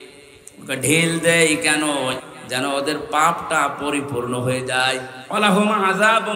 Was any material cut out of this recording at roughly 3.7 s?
no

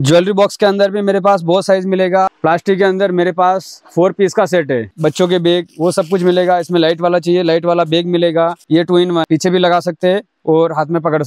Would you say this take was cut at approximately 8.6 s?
yes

